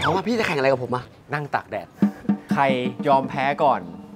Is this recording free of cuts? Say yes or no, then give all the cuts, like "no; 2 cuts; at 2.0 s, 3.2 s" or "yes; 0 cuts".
no; 2 cuts; at 1.2 s, 2.9 s